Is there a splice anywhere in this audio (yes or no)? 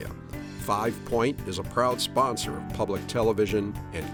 no